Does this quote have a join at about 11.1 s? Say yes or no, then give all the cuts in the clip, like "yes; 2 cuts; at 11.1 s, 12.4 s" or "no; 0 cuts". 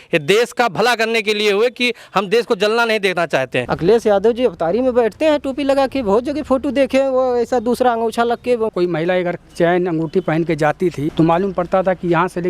yes; 3 cuts; at 3.6 s, 8.7 s, 11.1 s